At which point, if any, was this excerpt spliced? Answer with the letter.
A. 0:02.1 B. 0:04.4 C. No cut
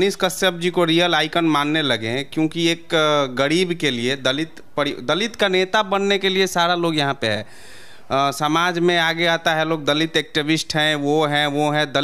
C